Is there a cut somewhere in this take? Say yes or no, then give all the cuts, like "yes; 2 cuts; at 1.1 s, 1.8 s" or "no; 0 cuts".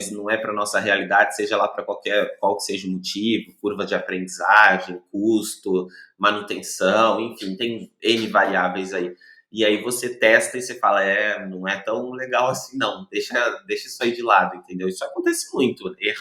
no; 0 cuts